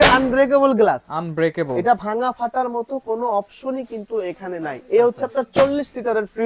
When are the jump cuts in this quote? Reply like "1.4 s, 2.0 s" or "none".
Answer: none